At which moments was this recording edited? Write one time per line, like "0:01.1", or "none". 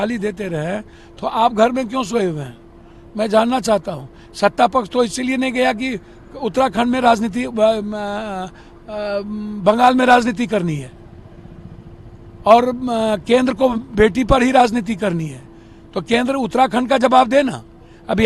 none

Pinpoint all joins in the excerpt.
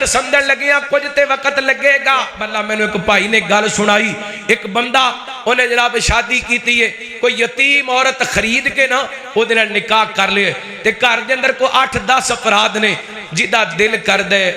0:02.5

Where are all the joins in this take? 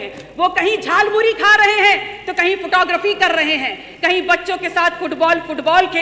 none

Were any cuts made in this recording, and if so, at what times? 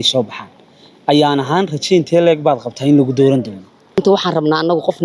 0:04.0

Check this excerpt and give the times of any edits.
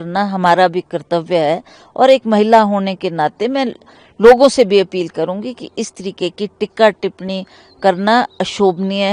none

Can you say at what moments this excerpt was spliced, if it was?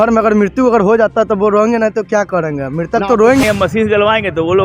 0:03.4

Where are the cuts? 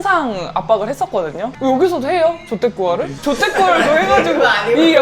0:01.6

